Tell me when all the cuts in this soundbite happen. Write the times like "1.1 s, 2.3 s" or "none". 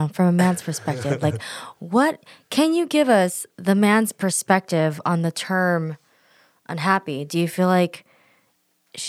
none